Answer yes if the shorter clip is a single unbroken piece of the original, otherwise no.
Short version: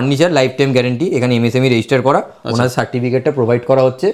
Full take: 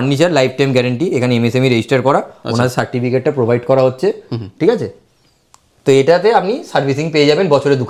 yes